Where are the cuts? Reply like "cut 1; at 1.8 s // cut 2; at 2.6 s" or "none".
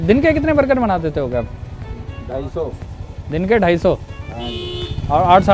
none